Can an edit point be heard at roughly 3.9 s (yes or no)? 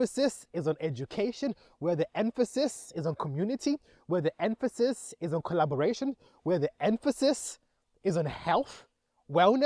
no